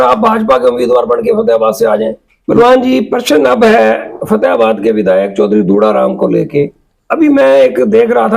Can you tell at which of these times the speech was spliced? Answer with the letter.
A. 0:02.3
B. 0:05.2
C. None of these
A